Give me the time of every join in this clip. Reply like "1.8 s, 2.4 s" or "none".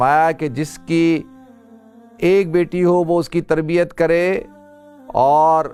none

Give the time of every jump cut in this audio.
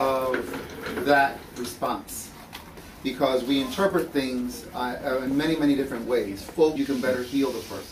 none

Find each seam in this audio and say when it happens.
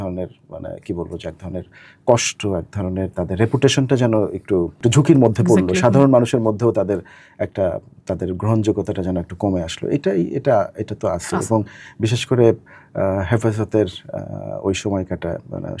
none

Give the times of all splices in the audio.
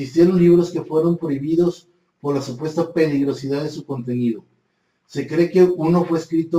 none

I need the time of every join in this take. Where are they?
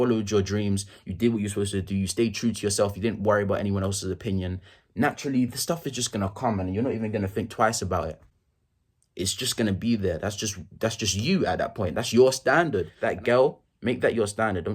12.9 s

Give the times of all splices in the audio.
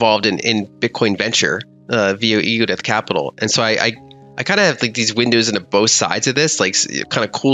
none

